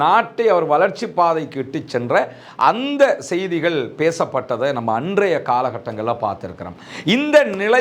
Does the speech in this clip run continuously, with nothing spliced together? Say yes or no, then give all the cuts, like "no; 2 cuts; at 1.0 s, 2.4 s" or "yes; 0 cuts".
yes; 0 cuts